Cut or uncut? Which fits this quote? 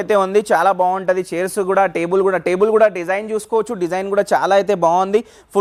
uncut